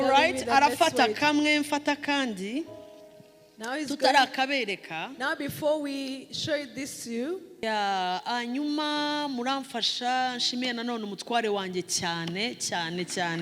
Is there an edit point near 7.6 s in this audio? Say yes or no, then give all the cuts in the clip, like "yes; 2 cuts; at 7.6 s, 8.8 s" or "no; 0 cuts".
yes; 1 cut; at 7.6 s